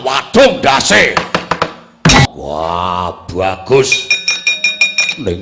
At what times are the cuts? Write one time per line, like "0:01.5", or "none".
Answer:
0:02.3